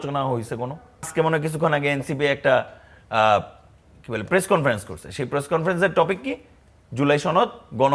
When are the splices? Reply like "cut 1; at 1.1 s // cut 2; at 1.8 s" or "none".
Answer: cut 1; at 1.1 s